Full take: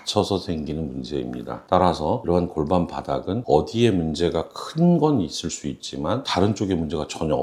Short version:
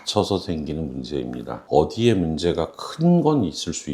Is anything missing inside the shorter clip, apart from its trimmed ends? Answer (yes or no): yes